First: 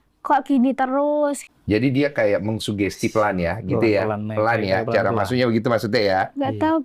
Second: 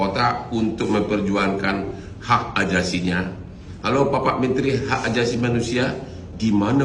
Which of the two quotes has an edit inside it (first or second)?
first